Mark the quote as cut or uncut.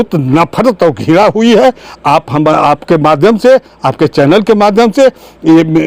uncut